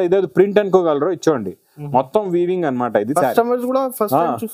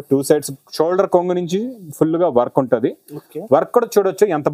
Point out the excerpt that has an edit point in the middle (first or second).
first